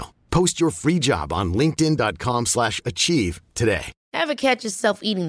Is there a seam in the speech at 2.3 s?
no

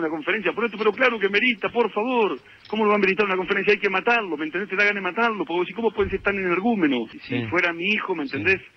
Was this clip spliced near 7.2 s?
yes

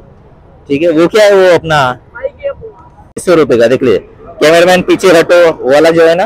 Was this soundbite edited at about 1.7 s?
no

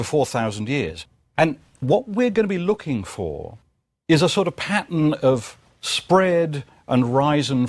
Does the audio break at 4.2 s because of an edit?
yes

